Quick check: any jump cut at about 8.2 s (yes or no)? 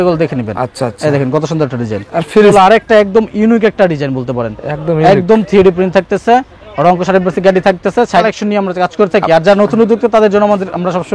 yes